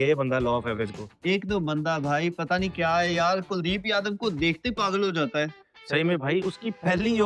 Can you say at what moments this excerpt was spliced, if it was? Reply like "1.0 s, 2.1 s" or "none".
none